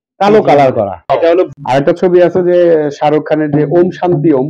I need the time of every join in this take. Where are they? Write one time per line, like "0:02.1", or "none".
0:01.3